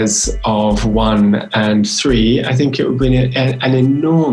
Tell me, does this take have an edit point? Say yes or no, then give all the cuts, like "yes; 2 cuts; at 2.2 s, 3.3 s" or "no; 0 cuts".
no; 0 cuts